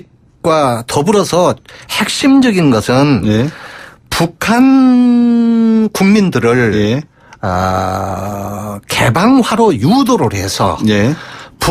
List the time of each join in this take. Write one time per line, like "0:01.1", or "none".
0:08.2